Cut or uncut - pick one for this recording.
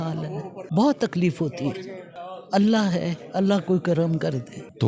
uncut